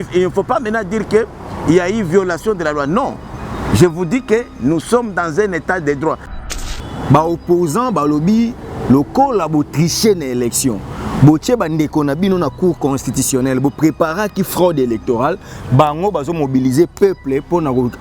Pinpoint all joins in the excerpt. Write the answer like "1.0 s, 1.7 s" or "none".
6.4 s